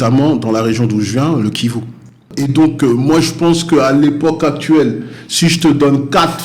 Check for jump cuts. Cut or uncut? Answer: cut